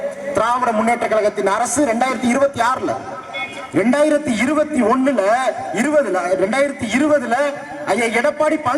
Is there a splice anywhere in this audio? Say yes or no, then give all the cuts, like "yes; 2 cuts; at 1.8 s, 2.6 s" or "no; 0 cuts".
no; 0 cuts